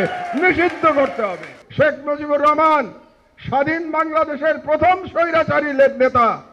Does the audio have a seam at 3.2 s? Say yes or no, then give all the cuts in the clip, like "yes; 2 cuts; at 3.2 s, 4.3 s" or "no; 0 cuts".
no; 1 cut; at 1.6 s